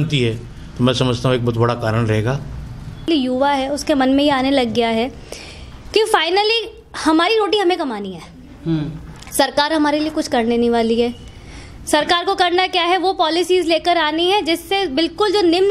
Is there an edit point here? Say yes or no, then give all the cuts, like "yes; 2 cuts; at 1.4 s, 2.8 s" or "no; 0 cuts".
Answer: yes; 1 cut; at 3.1 s